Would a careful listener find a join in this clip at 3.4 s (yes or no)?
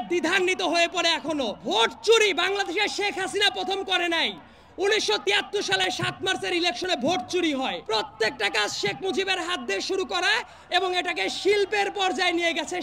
no